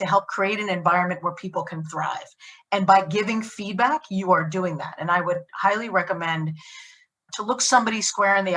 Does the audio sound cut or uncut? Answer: cut